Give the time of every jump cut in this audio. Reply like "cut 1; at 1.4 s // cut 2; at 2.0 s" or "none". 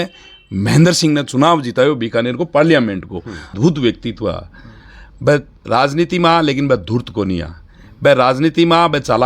cut 1; at 3.6 s